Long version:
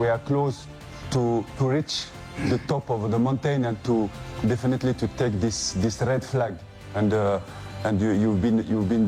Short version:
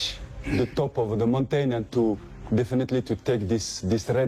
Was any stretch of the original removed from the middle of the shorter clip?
no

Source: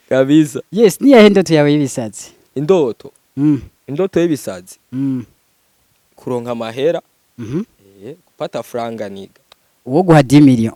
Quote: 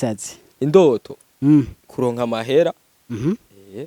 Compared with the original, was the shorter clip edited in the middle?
yes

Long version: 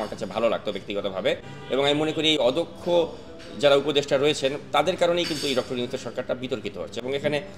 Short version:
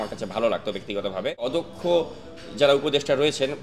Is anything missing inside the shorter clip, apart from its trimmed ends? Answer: yes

